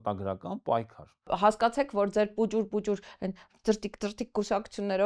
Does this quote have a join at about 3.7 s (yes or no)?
no